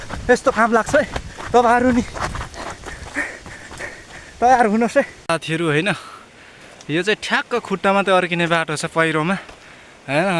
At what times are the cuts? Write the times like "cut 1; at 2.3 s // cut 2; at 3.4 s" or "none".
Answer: cut 1; at 5.2 s